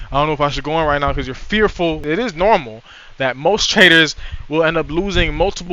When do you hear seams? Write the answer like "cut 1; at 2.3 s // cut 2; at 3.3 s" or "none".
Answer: cut 1; at 2.0 s